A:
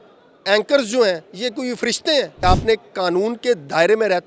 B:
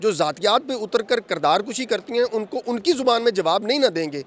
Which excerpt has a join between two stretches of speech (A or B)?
A